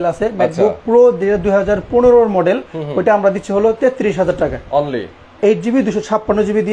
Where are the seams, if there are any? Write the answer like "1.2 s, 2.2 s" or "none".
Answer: none